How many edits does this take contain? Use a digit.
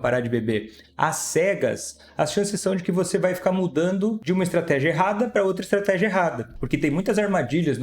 2